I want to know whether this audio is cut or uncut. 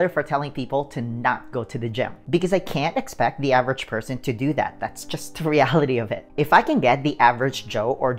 cut